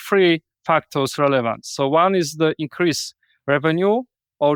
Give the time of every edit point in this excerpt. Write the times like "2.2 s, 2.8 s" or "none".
none